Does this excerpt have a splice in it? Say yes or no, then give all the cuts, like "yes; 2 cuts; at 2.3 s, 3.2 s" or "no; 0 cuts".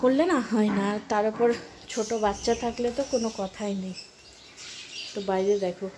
no; 0 cuts